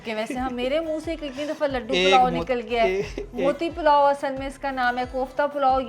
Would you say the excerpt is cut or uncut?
uncut